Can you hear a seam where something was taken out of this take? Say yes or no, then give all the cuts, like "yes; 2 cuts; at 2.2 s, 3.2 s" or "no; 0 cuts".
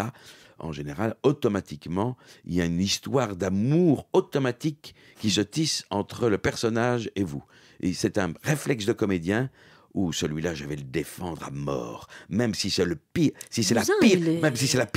no; 0 cuts